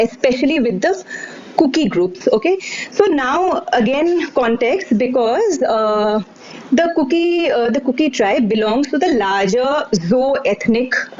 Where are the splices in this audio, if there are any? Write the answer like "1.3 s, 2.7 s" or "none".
none